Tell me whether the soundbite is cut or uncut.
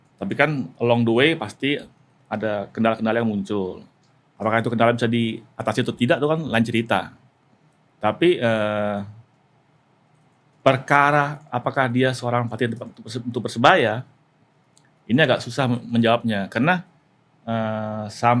uncut